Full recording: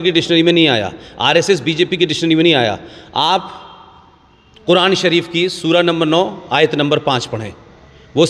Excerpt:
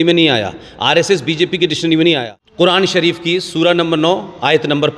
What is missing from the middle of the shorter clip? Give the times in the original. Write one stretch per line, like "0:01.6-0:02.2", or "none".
0:02.8-0:04.4